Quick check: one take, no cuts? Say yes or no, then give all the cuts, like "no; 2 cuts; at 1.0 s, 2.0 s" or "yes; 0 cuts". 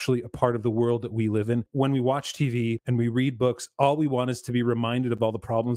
no; 2 cuts; at 1.7 s, 2.8 s